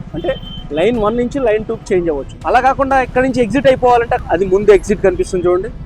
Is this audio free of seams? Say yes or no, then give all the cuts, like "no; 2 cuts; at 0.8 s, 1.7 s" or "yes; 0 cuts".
no; 1 cut; at 4.2 s